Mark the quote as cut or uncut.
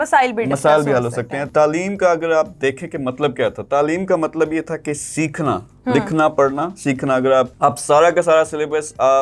cut